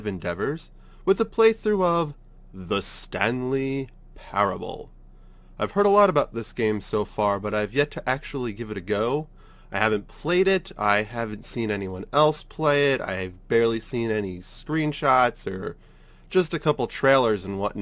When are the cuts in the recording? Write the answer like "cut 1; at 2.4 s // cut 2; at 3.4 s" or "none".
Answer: cut 1; at 12.5 s